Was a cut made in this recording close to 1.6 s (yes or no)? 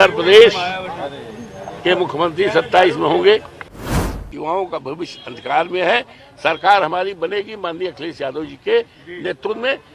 no